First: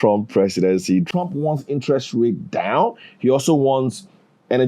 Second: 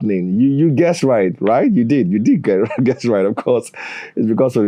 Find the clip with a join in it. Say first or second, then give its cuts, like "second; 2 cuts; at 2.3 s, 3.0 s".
first; 1 cut; at 1.1 s